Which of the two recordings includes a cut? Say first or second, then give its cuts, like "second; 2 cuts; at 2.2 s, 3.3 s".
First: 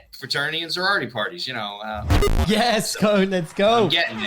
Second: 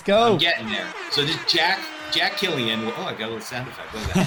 first; 1 cut; at 2.1 s